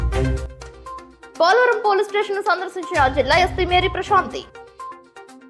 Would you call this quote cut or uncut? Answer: uncut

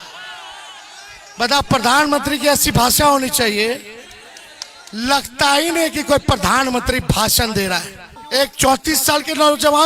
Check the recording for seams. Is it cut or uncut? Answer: cut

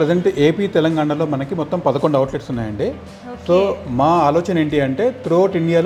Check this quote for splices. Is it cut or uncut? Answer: uncut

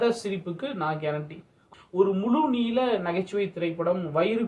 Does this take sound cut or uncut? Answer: cut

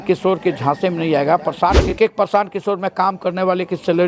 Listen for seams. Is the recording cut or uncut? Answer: cut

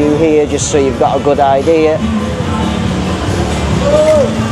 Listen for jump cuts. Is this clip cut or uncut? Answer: uncut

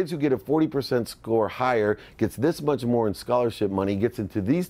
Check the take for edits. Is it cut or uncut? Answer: uncut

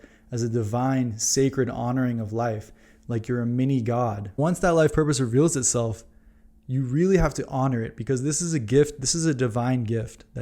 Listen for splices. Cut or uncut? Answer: cut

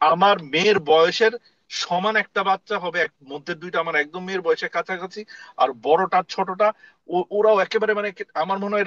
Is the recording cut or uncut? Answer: uncut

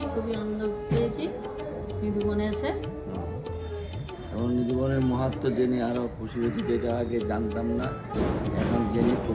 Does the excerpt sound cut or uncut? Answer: uncut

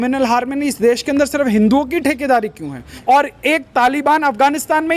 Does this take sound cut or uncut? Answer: cut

